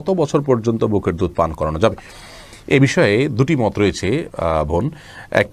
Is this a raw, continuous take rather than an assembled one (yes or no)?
yes